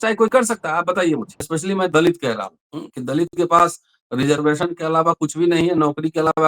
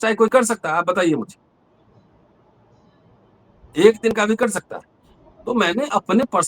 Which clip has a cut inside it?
first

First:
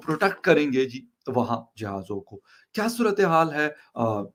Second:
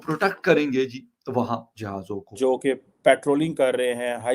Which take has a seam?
second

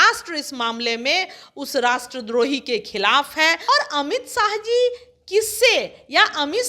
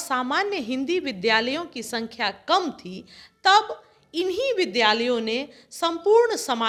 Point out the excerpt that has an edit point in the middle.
first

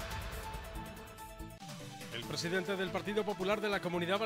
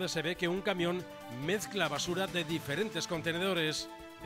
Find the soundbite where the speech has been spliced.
first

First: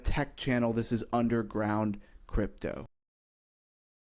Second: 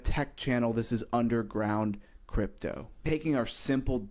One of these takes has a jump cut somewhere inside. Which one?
second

